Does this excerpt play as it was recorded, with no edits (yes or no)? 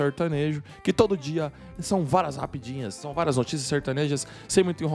yes